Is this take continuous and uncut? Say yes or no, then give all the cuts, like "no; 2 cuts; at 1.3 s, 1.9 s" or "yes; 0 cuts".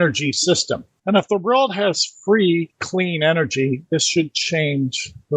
no; 1 cut; at 0.9 s